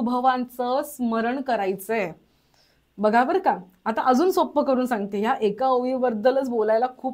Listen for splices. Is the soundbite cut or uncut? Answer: uncut